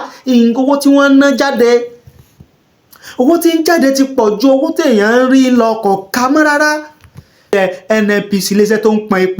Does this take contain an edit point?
yes; 1 cut; at 7.5 s

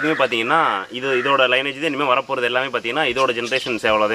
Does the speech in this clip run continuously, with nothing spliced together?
yes; 0 cuts

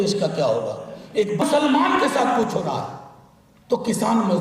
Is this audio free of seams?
no; 1 cut; at 1.4 s

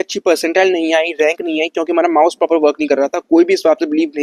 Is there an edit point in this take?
no; 0 cuts

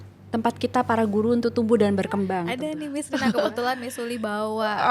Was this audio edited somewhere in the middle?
yes; 1 cut; at 2.5 s

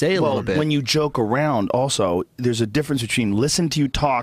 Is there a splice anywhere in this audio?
no; 0 cuts

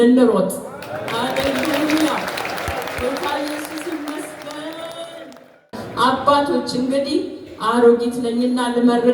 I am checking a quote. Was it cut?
yes; 1 cut; at 5.8 s

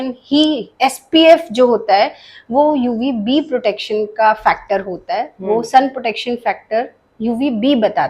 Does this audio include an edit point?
no; 0 cuts

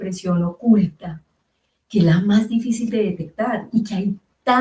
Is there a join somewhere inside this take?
no; 0 cuts

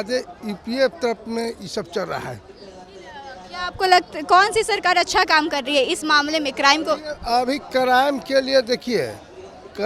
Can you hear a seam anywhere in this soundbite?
no; 0 cuts

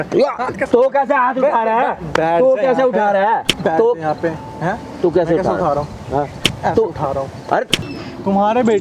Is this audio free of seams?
no; 1 cut; at 7.8 s

